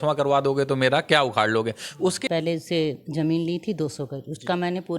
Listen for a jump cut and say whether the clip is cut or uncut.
cut